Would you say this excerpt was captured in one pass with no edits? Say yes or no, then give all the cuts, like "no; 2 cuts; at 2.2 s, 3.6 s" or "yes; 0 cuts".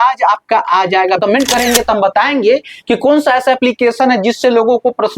no; 1 cut; at 1.2 s